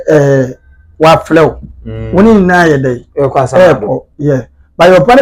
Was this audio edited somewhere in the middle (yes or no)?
no